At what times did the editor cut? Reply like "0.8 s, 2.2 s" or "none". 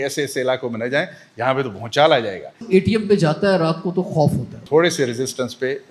2.6 s, 4.6 s